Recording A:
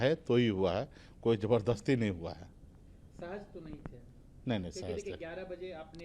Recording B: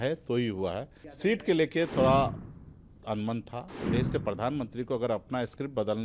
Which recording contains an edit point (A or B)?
B